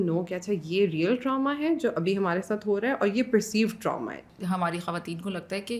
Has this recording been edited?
yes; 1 cut; at 4.3 s

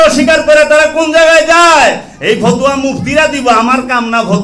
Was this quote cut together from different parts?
no; 0 cuts

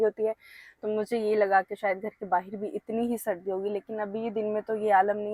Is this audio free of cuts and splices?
yes; 0 cuts

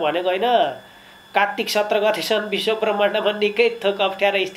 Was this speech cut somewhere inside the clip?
no; 0 cuts

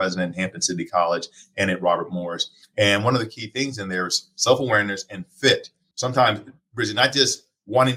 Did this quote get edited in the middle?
yes; 1 cut; at 5.8 s

